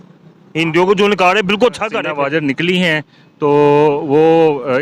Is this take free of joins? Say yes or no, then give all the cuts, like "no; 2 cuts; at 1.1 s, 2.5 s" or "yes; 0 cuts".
no; 1 cut; at 2.0 s